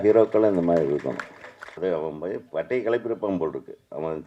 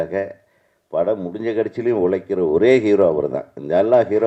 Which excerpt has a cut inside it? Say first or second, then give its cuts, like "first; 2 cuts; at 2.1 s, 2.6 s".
first; 1 cut; at 1.8 s